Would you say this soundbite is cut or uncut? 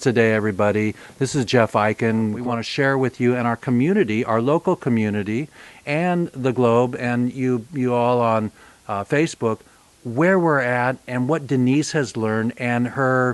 cut